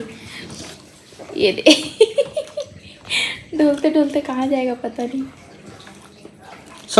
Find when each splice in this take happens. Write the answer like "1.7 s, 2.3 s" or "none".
none